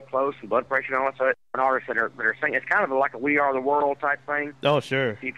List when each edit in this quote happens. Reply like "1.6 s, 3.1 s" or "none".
1.5 s